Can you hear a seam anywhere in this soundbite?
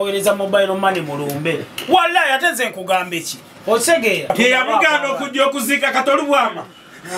yes; 1 cut; at 4.3 s

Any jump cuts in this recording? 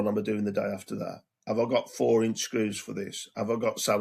no; 0 cuts

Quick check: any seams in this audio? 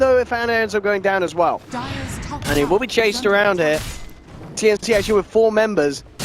no; 0 cuts

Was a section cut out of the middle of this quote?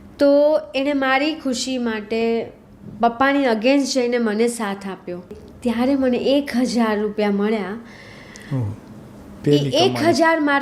yes; 1 cut; at 5.4 s

